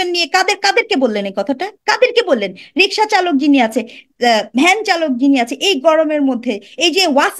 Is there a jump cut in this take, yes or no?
yes